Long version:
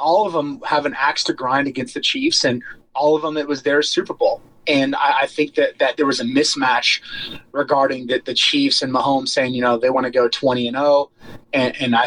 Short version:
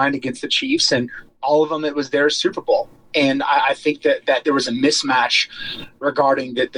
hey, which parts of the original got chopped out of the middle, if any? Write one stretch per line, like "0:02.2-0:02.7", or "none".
none